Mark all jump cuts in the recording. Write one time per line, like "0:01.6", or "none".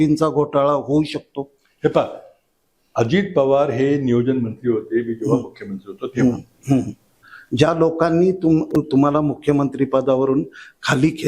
0:07.2